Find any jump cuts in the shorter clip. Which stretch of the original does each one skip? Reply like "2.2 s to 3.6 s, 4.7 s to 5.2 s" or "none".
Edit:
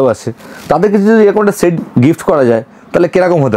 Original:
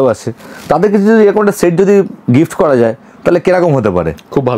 1.7 s to 2.1 s